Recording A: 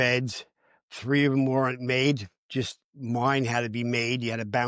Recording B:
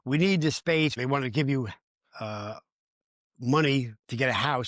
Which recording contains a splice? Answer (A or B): B